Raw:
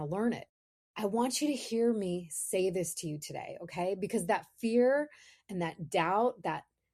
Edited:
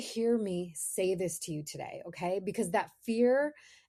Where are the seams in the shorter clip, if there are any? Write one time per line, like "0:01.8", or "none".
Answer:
none